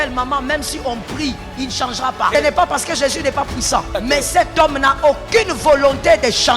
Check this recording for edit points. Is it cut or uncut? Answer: cut